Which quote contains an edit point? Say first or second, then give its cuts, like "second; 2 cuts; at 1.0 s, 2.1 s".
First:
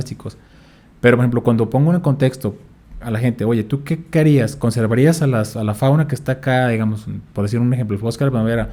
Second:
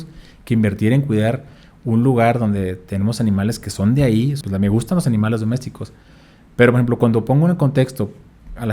second; 1 cut; at 4.4 s